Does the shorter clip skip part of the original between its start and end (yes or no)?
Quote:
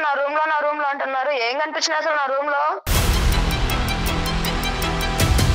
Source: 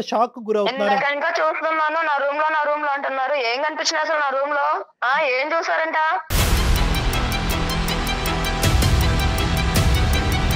yes